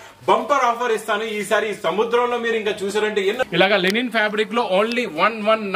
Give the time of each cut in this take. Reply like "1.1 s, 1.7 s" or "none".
3.4 s